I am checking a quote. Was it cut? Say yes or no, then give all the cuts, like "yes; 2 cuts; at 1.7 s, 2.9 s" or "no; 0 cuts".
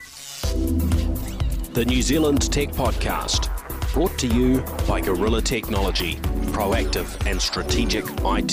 no; 0 cuts